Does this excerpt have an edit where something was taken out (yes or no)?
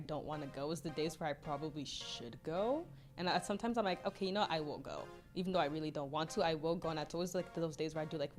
no